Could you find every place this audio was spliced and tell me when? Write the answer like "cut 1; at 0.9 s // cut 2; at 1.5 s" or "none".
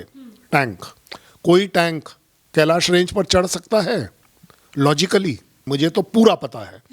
cut 1; at 5.7 s